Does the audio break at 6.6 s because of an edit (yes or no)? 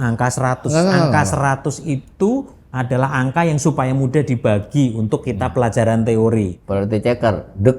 yes